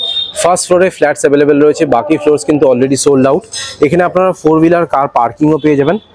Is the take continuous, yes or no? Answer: yes